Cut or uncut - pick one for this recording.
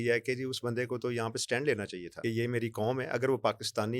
cut